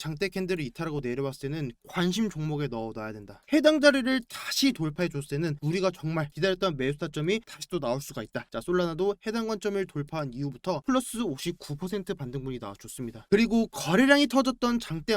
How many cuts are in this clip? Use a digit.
2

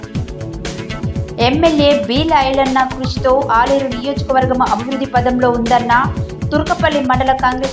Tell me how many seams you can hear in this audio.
1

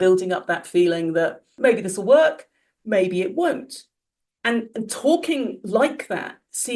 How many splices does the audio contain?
1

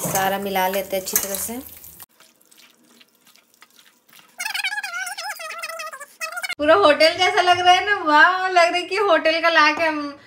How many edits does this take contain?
2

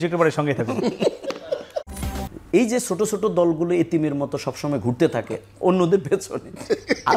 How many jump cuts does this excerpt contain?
1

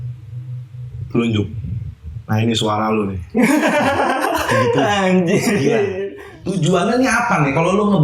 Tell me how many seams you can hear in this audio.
1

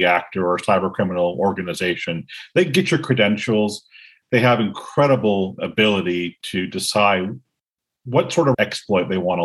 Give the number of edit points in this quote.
1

